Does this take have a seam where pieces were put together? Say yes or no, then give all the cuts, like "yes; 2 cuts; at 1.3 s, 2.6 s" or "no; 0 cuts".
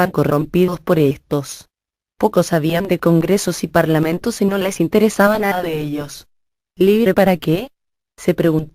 yes; 1 cut; at 3.3 s